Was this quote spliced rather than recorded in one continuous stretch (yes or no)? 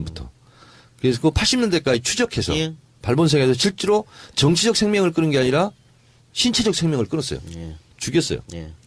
yes